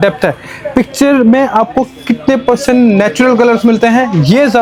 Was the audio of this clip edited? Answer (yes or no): no